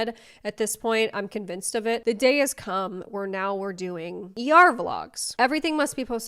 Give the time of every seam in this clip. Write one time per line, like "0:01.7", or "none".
0:02.0
0:05.3